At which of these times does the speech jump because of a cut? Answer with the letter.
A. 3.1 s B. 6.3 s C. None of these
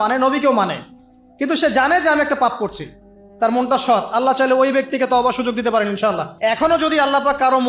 B